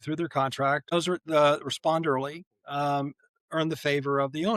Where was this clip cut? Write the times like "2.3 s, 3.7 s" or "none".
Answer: 0.9 s